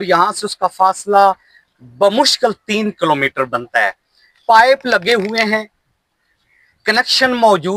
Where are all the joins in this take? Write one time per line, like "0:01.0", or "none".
none